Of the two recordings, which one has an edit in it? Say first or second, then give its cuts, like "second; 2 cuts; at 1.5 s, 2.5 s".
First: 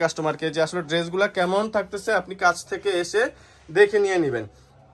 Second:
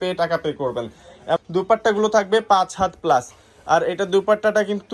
second; 1 cut; at 1.4 s